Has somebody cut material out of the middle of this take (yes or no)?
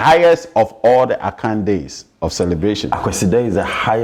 no